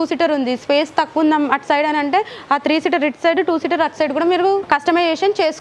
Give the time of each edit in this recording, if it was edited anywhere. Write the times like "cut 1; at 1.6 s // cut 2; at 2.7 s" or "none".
cut 1; at 4.6 s